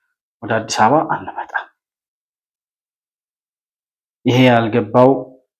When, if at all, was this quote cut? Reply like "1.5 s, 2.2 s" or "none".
none